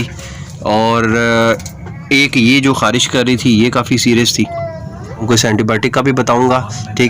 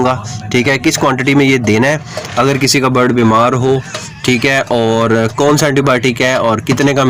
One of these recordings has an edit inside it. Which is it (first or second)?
first